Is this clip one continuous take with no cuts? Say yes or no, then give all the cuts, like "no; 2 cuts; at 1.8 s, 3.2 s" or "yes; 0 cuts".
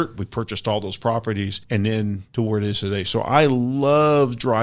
no; 2 cuts; at 1.6 s, 2.2 s